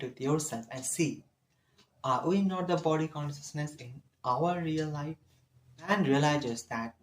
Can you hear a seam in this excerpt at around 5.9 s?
yes; 1 cut; at 5.9 s

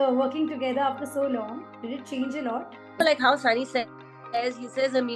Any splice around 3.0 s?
yes; 1 cut; at 3.0 s

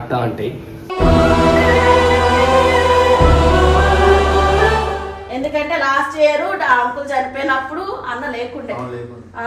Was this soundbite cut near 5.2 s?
yes; 1 cut; at 5.2 s

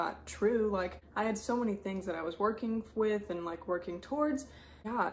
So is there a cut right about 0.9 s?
no; 0 cuts

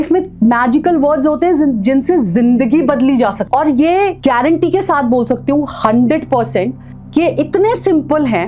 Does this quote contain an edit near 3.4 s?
yes; 1 cut; at 3.4 s

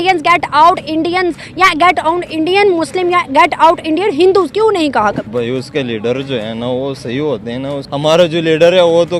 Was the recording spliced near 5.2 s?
yes; 2 cuts; at 5.2 s, 7.8 s

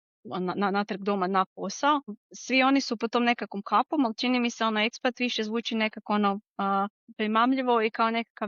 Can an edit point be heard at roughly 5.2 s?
no; 2 cuts; at 2.3 s, 7.1 s

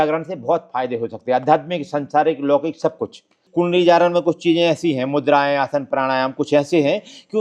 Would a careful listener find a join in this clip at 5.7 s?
no; 1 cut; at 3.4 s

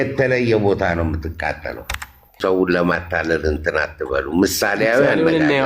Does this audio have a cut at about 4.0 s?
no; 1 cut; at 2.4 s

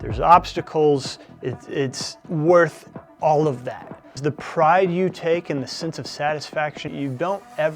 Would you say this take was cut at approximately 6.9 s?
yes; 2 cuts; at 4.2 s, 6.9 s

